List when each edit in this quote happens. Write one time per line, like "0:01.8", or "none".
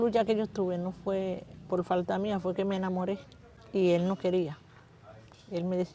0:03.5